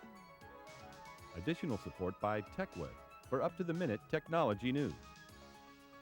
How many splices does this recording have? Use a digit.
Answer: 2